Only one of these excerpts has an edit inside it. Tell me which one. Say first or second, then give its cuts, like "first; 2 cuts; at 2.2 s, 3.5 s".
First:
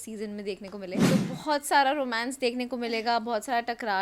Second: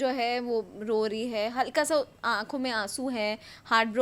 first; 1 cut; at 1.0 s